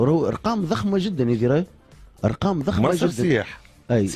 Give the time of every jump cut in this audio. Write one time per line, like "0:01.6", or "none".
none